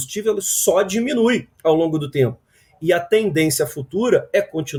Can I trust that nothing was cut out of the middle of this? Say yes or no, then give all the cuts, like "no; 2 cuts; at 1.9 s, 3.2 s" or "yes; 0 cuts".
yes; 0 cuts